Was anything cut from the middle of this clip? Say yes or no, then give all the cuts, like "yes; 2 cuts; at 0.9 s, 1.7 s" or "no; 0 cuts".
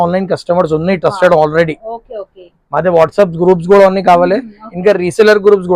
no; 0 cuts